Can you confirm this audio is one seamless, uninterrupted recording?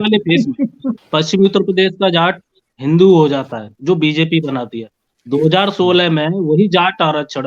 no; 1 cut; at 1.0 s

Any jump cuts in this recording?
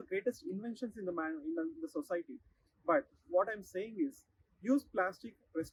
no; 0 cuts

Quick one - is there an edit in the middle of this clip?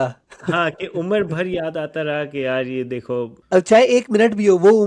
yes; 1 cut; at 3.4 s

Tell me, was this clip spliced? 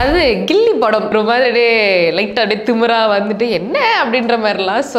yes; 1 cut; at 1.1 s

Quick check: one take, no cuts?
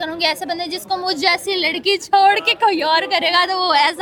yes; 0 cuts

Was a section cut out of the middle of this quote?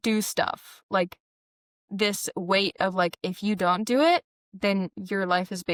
no; 0 cuts

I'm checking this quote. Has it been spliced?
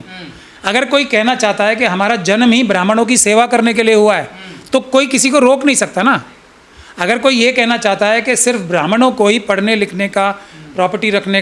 no; 0 cuts

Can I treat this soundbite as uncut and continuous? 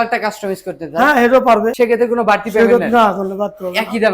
no; 1 cut; at 1.7 s

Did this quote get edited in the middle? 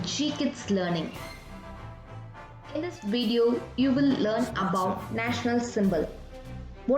yes; 2 cuts; at 1.2 s, 2.7 s

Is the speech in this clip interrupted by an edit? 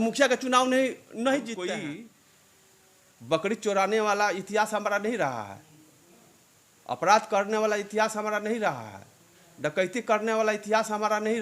yes; 1 cut; at 1.6 s

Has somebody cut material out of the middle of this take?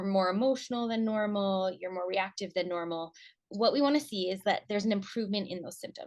yes; 1 cut; at 3.5 s

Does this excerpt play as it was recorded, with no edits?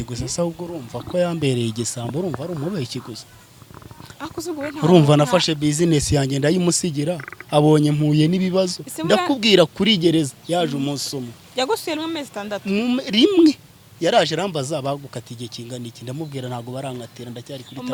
yes; 0 cuts

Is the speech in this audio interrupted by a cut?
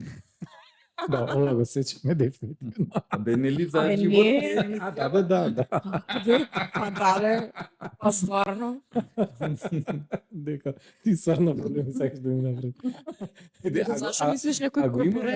no; 0 cuts

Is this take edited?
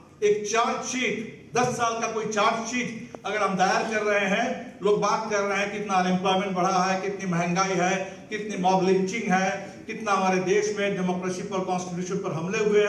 no; 0 cuts

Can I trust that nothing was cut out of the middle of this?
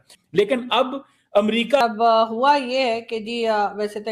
no; 1 cut; at 1.8 s

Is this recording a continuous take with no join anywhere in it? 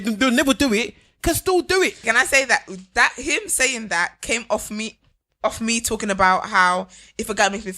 no; 1 cut; at 2.0 s

